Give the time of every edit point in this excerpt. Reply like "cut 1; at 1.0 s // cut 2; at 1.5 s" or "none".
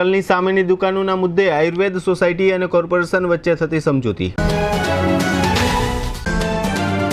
cut 1; at 6.1 s